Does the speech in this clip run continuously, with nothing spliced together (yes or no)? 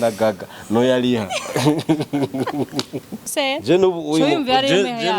no